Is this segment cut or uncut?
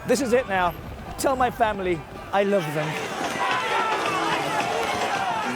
cut